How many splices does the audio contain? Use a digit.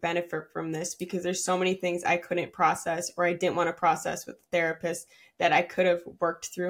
0